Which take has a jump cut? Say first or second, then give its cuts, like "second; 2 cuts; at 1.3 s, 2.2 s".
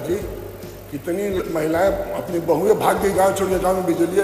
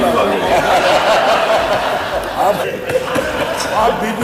second; 1 cut; at 2.6 s